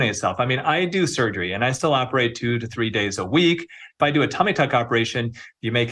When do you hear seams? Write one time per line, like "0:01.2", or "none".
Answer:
0:04.0